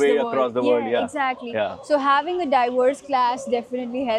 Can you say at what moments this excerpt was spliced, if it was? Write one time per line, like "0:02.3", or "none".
none